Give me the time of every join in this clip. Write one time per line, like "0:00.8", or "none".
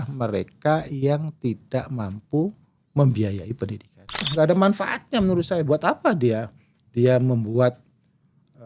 0:04.3